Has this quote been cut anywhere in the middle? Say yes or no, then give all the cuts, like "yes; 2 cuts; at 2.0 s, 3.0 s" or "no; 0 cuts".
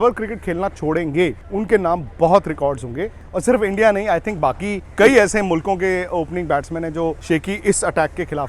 yes; 4 cuts; at 1.4 s, 3.2 s, 4.9 s, 7.2 s